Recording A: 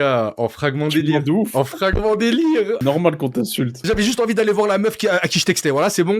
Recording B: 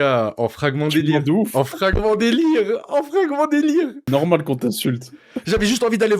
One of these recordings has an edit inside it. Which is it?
A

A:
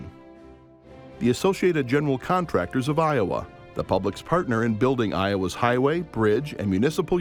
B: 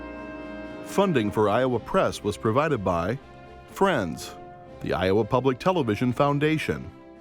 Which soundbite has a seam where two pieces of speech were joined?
B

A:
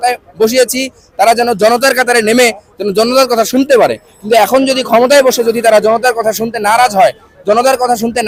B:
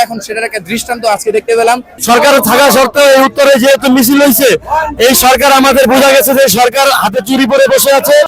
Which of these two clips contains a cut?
B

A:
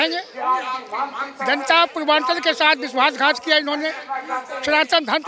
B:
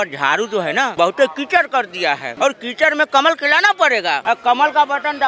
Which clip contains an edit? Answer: B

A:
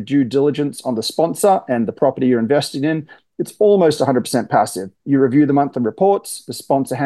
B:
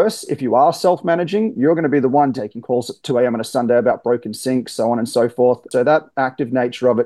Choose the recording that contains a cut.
B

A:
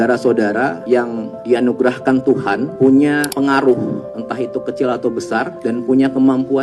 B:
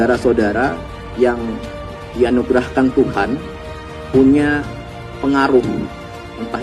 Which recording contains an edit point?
A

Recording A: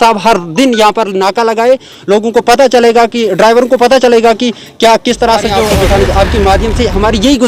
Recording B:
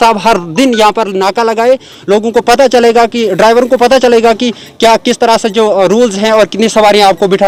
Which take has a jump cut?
A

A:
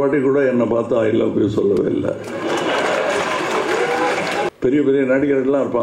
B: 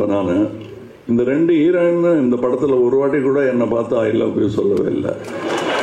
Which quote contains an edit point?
A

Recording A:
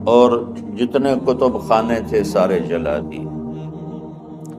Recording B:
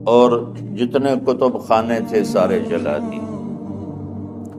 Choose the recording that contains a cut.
A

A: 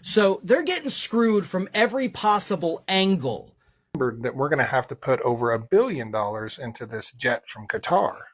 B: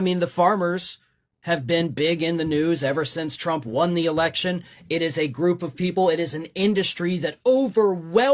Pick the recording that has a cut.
A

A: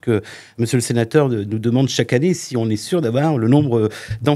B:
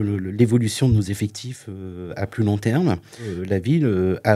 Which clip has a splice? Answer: B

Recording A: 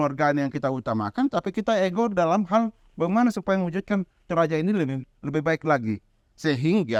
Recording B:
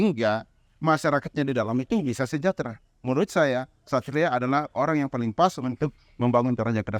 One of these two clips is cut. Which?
B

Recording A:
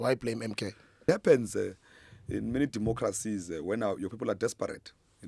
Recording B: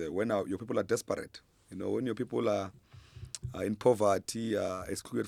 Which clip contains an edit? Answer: A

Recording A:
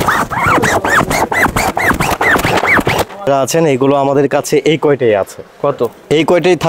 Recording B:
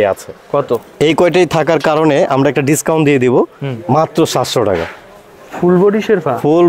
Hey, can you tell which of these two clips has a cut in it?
A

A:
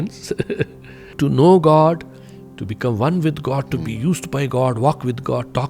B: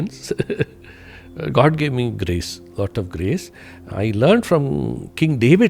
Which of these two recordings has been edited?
A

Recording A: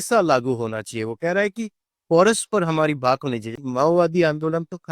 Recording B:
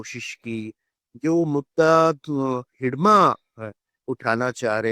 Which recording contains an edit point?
A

